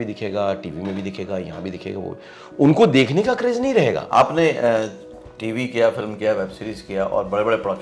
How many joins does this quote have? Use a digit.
1